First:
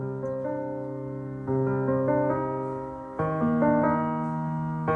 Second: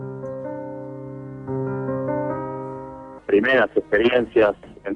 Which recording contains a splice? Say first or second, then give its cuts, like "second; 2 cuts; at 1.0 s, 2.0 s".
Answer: first; 1 cut; at 3.2 s